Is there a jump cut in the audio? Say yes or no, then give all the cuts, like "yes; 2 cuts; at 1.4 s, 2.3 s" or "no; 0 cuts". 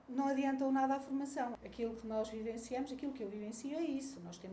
yes; 1 cut; at 1.6 s